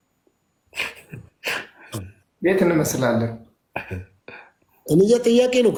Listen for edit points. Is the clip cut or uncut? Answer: uncut